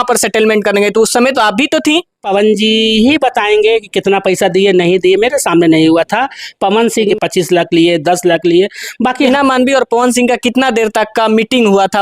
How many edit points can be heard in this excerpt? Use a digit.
3